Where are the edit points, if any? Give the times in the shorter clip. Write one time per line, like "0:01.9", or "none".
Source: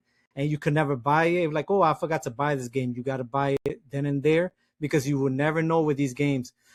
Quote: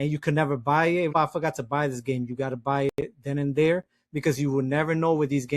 0:01.2